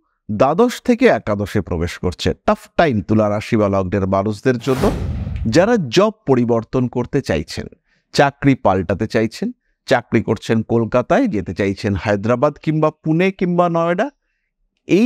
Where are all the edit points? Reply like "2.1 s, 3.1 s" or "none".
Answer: 5.1 s